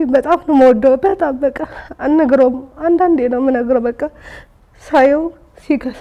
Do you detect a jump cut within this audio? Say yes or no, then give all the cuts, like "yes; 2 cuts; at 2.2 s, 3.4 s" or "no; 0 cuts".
no; 0 cuts